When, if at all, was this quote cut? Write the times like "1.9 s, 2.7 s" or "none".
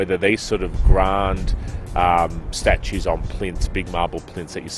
2.5 s

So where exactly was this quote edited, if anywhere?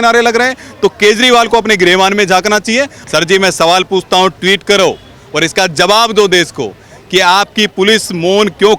3.0 s

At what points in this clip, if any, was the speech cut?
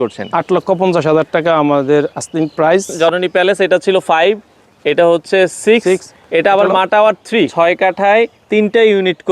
2.9 s, 7.5 s

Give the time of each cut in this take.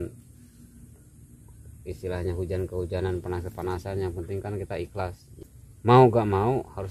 5.3 s

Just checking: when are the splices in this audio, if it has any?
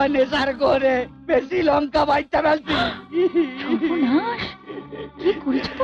none

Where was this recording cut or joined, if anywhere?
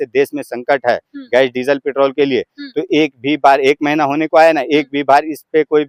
none

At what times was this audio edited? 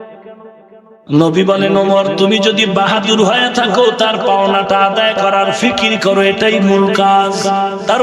0.9 s

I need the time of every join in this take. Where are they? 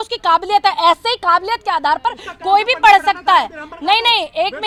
none

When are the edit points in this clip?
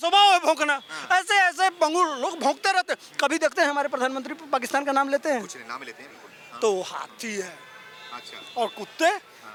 none

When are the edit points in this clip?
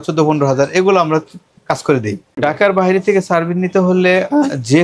2.3 s

